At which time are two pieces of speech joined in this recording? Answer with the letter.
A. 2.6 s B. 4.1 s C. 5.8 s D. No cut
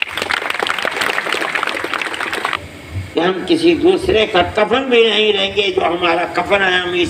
A